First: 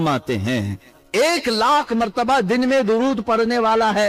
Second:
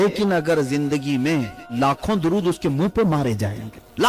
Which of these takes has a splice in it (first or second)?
second